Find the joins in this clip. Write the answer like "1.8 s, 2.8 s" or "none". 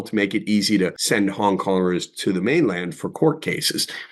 1.0 s